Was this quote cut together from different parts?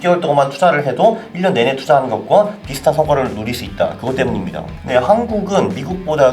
yes; 1 cut; at 4.7 s

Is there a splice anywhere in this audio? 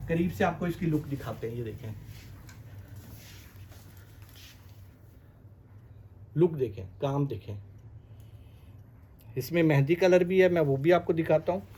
no; 0 cuts

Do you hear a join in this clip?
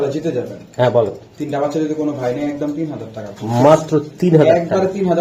no; 0 cuts

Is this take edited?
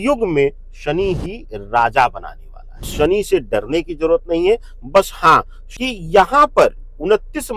yes; 2 cuts; at 2.9 s, 5.6 s

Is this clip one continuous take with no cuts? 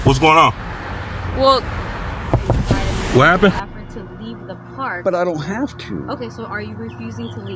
no; 1 cut; at 3.6 s

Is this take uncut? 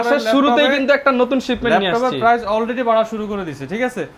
yes; 0 cuts

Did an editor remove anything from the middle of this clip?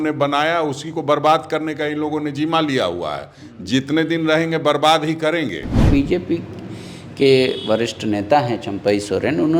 yes; 1 cut; at 5.8 s

